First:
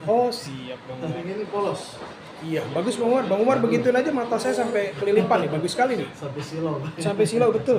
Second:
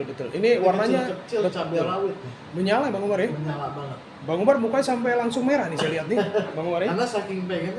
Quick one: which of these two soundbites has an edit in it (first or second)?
first